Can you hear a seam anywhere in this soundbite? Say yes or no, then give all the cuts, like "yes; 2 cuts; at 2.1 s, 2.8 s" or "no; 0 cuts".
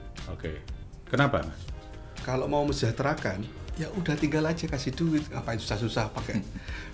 no; 0 cuts